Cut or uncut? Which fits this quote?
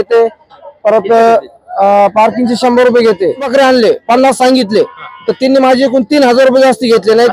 cut